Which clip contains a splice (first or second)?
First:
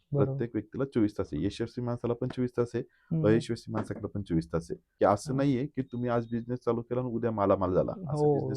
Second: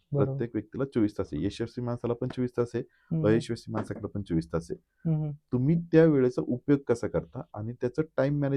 first